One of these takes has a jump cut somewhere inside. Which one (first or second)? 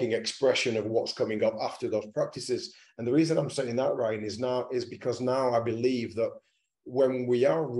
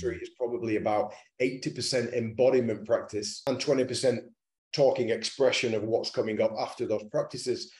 second